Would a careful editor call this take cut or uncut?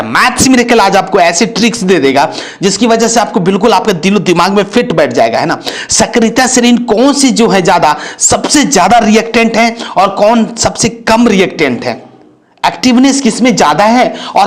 uncut